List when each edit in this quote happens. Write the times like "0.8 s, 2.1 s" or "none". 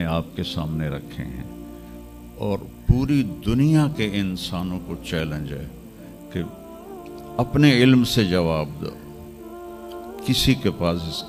none